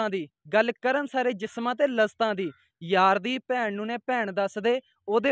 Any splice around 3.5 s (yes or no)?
no